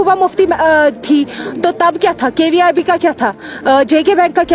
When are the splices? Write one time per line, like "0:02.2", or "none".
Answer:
none